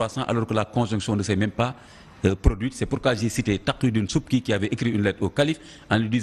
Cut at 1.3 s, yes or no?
yes